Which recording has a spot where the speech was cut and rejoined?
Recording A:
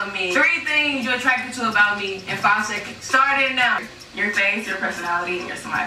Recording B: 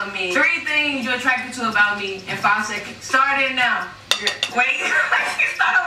A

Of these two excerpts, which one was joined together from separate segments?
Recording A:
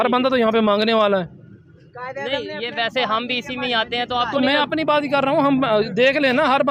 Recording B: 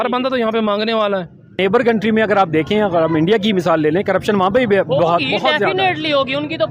B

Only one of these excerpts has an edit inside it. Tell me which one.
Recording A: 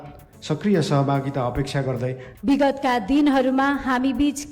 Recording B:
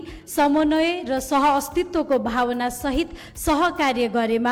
A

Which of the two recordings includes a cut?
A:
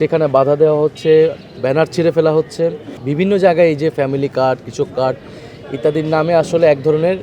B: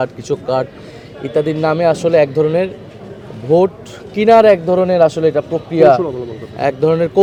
A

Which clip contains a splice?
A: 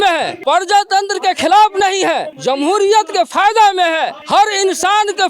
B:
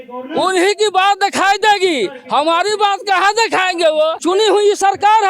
B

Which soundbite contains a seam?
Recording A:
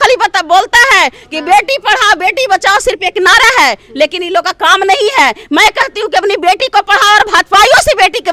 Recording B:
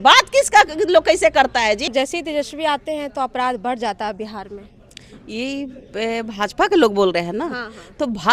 B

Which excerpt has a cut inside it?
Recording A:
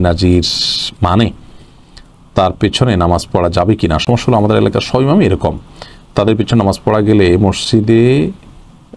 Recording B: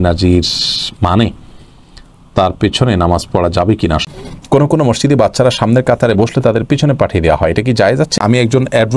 B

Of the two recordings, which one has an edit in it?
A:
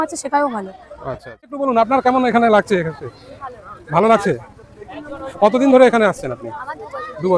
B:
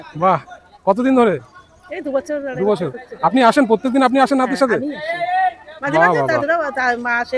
A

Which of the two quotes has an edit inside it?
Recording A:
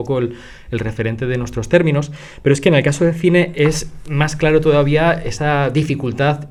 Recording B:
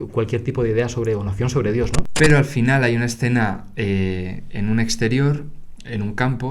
B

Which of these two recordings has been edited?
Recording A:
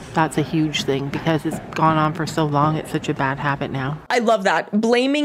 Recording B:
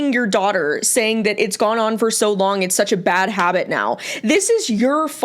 A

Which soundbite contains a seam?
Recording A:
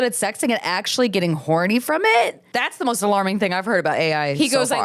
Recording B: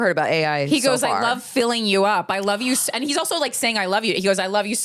A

